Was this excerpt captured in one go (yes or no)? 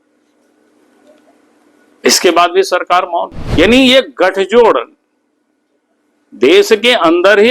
no